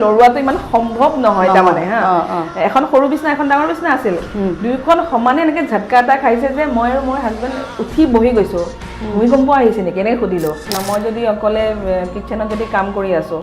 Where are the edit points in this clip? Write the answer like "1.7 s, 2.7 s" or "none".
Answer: 10.7 s